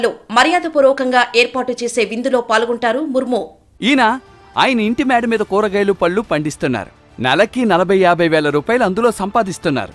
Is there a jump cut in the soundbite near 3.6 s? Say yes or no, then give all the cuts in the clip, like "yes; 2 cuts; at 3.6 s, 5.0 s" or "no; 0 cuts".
yes; 1 cut; at 3.6 s